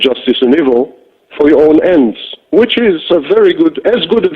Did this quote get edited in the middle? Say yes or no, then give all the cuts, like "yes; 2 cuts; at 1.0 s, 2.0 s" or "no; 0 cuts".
yes; 1 cut; at 2.1 s